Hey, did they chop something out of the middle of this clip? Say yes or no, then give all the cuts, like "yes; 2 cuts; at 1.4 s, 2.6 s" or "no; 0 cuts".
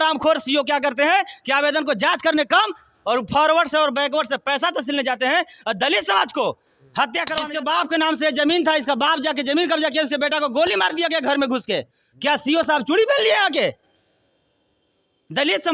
yes; 1 cut; at 7.3 s